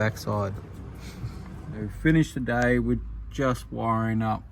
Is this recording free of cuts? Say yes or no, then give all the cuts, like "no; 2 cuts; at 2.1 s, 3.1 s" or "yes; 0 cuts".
no; 1 cut; at 1.6 s